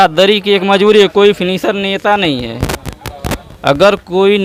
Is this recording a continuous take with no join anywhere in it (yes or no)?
yes